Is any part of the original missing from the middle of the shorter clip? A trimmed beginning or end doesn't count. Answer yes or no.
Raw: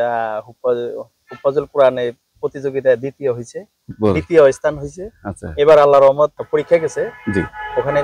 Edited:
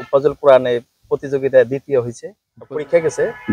yes